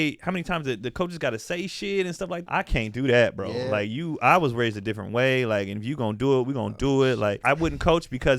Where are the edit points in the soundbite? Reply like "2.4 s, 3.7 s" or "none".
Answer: 2.4 s, 7.4 s